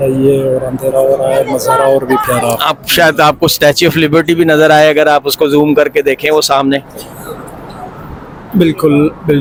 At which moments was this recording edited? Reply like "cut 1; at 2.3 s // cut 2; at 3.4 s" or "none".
none